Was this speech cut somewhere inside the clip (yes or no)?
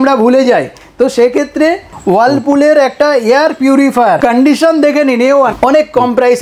yes